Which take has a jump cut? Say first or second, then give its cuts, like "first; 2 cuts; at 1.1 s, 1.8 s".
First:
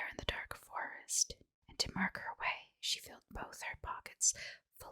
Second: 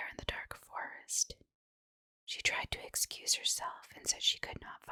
first; 1 cut; at 1.6 s